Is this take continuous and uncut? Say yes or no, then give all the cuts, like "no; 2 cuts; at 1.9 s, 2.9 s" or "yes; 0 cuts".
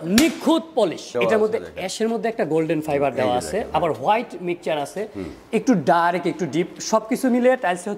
no; 1 cut; at 1.1 s